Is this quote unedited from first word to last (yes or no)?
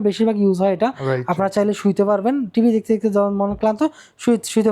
yes